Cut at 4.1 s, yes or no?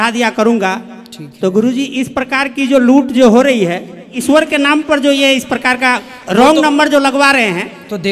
yes